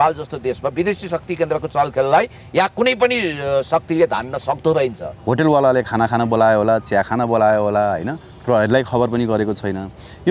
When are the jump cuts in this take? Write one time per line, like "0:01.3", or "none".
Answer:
0:05.1